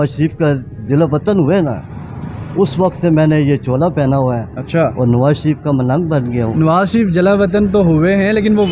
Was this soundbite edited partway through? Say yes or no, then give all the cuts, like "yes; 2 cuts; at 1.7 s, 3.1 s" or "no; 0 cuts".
no; 0 cuts